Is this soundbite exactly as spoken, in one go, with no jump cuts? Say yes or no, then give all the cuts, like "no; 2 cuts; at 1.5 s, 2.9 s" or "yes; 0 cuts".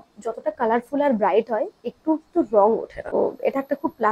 no; 1 cut; at 3.1 s